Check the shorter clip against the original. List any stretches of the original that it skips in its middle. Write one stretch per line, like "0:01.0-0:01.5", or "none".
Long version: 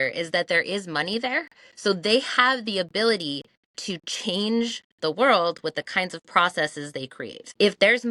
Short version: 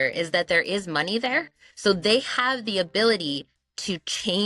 none